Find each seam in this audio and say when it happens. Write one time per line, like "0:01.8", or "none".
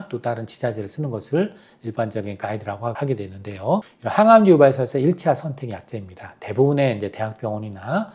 0:03.0
0:03.9

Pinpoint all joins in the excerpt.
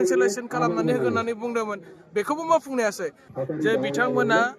0:03.3

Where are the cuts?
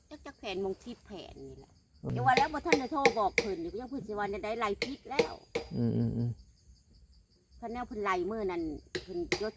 0:02.1

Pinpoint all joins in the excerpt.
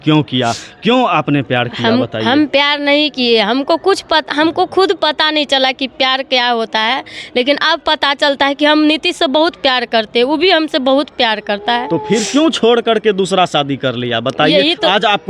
none

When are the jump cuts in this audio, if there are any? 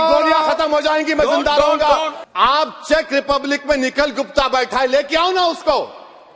0:02.2

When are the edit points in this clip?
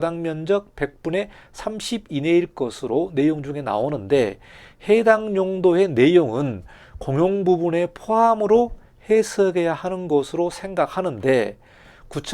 none

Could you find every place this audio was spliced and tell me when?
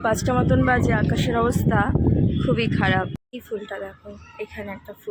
0:03.2

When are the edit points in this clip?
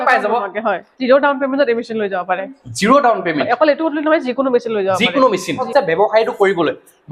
0:00.9
0:05.6

